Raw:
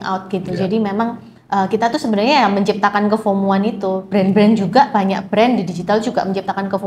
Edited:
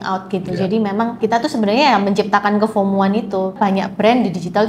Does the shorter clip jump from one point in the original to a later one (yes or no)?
yes